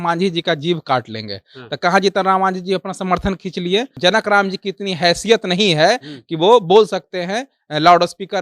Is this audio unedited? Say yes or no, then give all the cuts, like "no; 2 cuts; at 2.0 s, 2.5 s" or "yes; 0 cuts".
no; 1 cut; at 3.9 s